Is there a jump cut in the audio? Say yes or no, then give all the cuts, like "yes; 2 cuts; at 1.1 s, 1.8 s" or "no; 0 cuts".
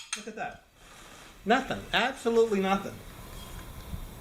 no; 0 cuts